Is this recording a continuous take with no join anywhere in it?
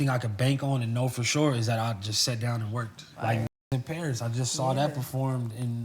no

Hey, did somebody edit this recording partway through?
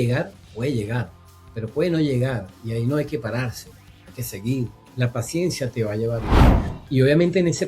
yes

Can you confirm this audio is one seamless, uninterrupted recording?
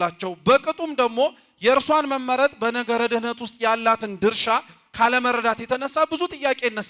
yes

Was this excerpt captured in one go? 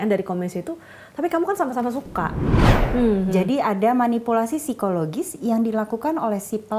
no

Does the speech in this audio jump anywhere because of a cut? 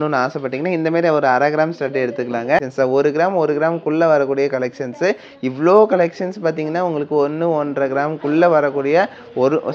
yes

